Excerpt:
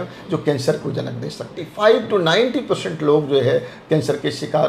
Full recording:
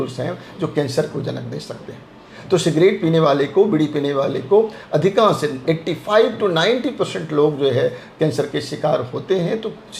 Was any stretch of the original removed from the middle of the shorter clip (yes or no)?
yes